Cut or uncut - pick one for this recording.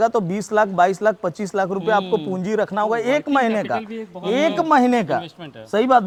uncut